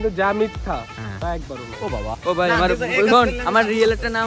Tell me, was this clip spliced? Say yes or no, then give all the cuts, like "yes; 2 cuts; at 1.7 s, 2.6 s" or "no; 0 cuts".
yes; 1 cut; at 2.2 s